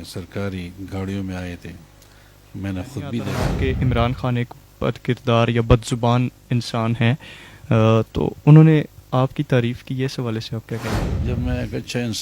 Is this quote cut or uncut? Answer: cut